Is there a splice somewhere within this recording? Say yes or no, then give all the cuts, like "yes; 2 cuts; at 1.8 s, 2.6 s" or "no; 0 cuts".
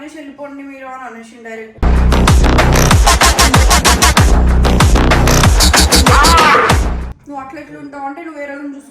yes; 1 cut; at 7.1 s